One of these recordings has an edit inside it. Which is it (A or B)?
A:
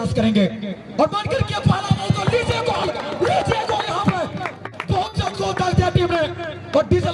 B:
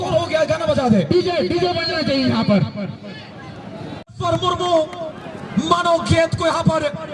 B